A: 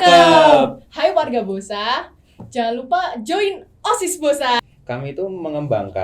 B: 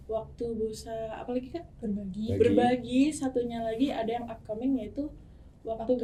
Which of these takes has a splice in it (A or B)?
A